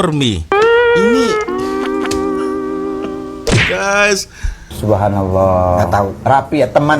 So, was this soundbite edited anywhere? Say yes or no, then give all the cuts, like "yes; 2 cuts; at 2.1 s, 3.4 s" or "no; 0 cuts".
yes; 1 cut; at 4.7 s